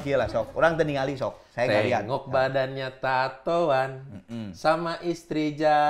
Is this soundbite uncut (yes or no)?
yes